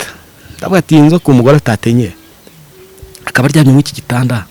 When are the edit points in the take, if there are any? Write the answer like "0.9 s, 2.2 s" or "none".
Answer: none